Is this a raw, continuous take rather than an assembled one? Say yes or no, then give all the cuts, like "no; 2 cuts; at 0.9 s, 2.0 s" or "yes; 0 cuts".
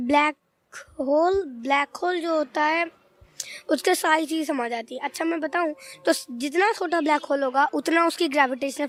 yes; 0 cuts